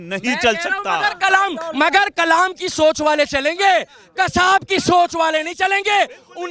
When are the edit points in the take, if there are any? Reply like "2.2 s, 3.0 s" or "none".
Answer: none

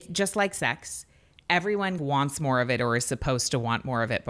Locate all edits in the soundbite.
2.0 s

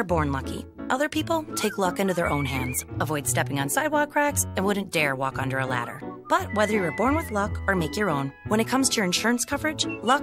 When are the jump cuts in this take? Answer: none

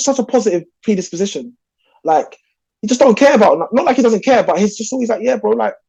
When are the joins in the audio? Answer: none

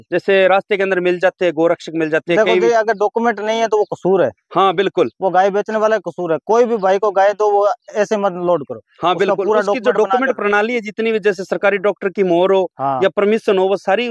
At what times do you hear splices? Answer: none

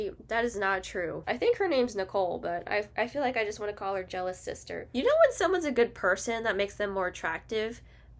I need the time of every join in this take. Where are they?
1.2 s, 4.9 s

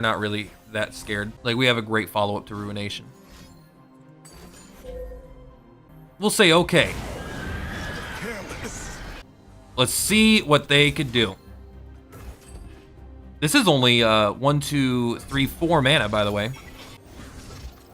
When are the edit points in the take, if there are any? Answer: 1.3 s, 5.9 s, 9.2 s, 17.0 s

